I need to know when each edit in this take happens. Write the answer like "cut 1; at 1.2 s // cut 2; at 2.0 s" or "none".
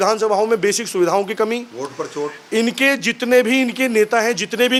none